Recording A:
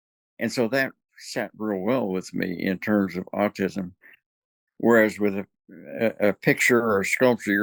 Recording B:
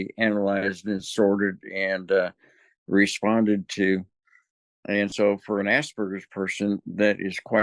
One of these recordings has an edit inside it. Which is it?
B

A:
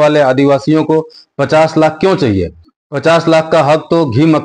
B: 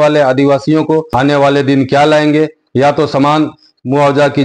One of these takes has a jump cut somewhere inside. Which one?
B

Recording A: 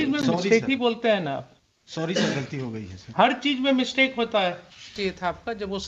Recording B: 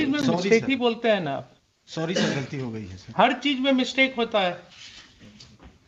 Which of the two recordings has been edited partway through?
A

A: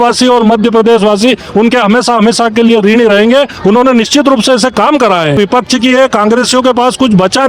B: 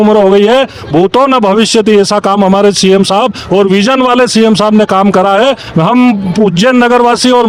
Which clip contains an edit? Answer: A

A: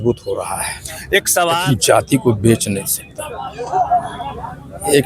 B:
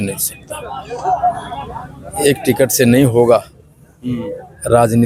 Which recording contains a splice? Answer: A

